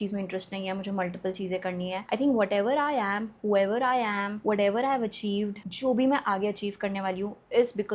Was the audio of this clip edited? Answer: no; 0 cuts

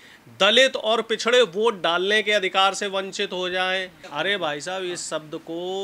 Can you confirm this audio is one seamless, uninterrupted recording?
no; 1 cut; at 4.0 s

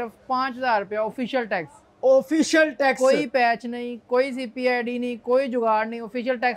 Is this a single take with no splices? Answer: yes; 0 cuts

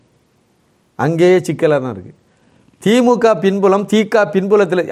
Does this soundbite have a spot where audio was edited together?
no; 0 cuts

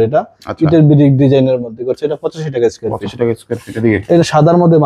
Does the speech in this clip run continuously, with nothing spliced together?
yes; 0 cuts

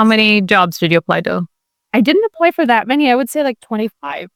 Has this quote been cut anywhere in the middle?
no; 0 cuts

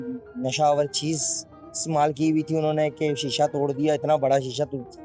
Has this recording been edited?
no; 0 cuts

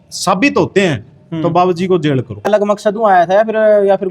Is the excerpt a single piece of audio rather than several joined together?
no; 1 cut; at 2.4 s

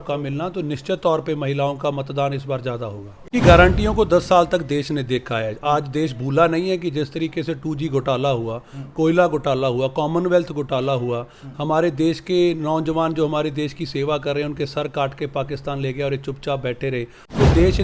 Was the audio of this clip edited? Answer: yes; 1 cut; at 3.3 s

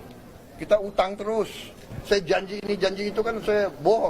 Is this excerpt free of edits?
no; 1 cut; at 1.9 s

